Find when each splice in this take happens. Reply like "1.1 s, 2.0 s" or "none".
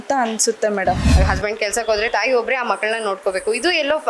1.0 s

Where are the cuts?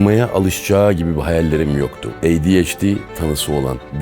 2.0 s

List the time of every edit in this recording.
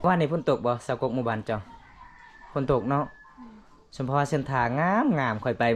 none

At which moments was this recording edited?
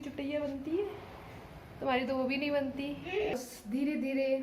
3.3 s

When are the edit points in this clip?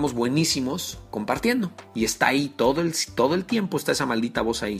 1.8 s

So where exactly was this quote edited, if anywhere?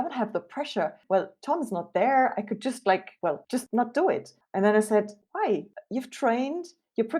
1.0 s, 3.4 s, 4.4 s

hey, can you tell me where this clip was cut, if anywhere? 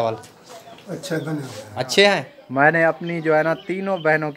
2.4 s

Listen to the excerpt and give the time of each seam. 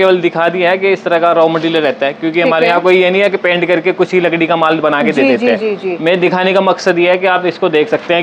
none

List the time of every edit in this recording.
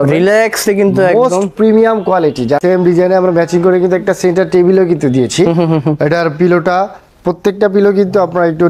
2.6 s

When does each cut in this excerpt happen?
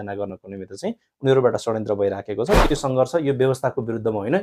2.7 s

